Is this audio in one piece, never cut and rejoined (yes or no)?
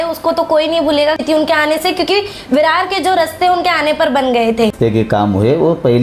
no